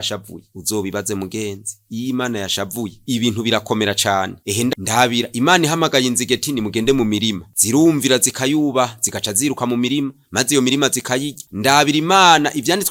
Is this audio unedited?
yes; 0 cuts

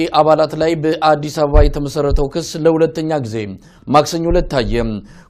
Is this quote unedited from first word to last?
yes; 0 cuts

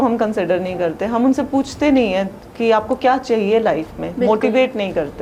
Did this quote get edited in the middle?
no; 0 cuts

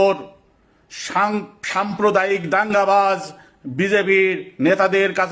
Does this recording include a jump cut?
no; 0 cuts

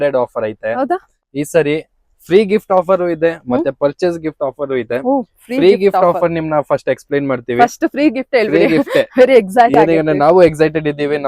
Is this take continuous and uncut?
no; 1 cut; at 1.1 s

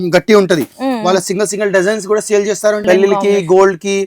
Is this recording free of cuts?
no; 1 cut; at 2.8 s

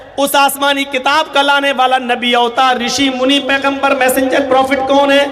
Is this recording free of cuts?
yes; 0 cuts

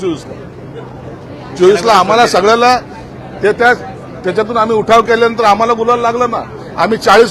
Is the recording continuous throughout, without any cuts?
yes; 0 cuts

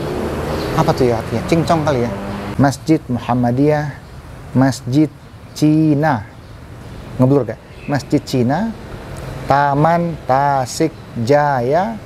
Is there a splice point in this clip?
yes; 1 cut; at 2.4 s

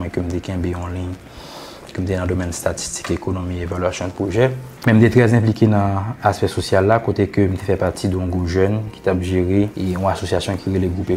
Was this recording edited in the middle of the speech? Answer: yes; 2 cuts; at 4.7 s, 9.7 s

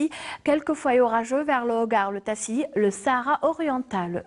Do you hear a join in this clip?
yes; 1 cut; at 3.1 s

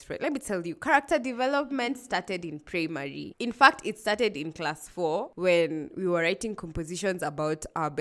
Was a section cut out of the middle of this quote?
no; 0 cuts

